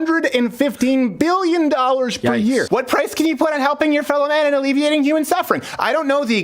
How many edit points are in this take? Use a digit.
1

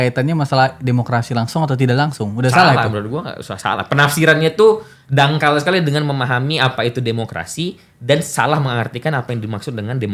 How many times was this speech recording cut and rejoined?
0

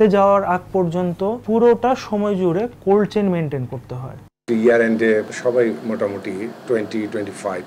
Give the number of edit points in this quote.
4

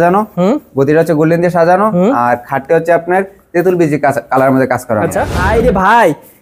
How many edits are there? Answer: 1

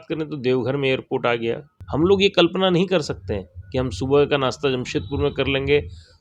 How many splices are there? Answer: 1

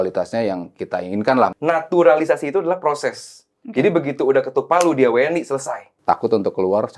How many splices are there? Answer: 2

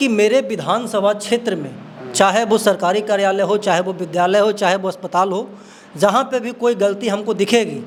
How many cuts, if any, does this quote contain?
0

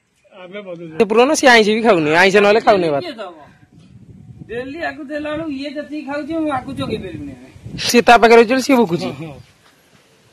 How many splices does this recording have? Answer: 2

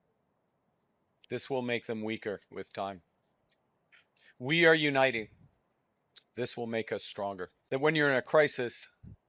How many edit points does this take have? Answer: 1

